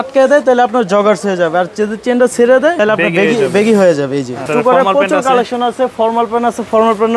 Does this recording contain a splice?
yes; 2 cuts; at 2.8 s, 4.5 s

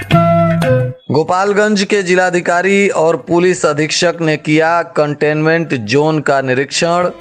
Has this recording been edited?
yes; 1 cut; at 0.9 s

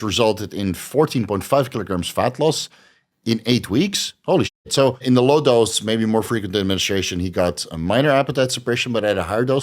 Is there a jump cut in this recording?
yes; 1 cut; at 5.0 s

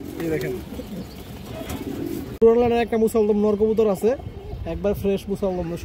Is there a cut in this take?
no; 0 cuts

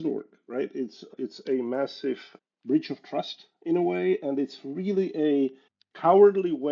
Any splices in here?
yes; 2 cuts; at 1.1 s, 2.3 s

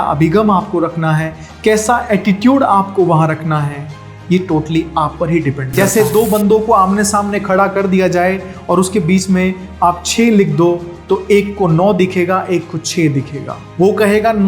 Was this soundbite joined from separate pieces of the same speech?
yes; 1 cut; at 5.6 s

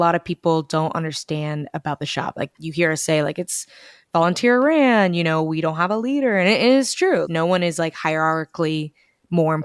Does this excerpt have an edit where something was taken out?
yes; 2 cuts; at 2.5 s, 7.3 s

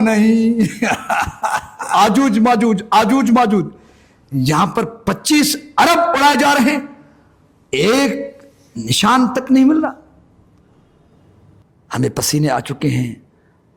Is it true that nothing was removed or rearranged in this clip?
no; 2 cuts; at 1.8 s, 11.6 s

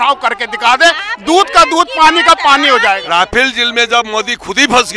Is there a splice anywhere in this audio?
yes; 1 cut; at 3.0 s

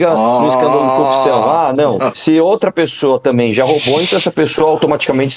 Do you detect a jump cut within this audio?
yes; 1 cut; at 2.1 s

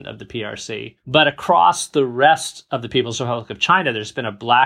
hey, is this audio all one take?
no; 1 cut; at 0.9 s

